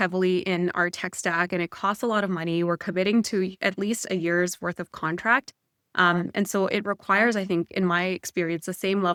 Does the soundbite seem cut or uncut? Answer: uncut